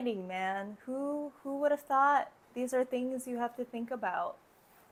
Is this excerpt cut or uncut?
uncut